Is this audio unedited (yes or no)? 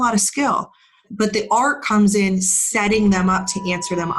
yes